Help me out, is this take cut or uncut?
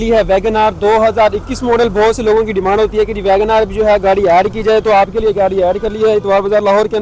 uncut